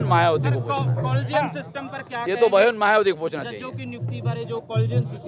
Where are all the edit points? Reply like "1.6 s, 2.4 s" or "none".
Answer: none